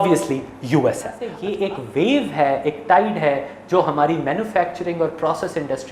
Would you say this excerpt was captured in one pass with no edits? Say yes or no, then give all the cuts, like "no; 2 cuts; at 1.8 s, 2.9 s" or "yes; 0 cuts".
no; 1 cut; at 1.4 s